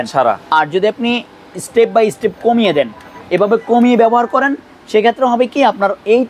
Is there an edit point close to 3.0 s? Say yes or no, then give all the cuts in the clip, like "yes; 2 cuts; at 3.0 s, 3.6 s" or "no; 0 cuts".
no; 0 cuts